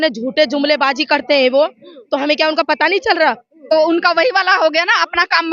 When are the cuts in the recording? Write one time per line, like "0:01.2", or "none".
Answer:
0:03.7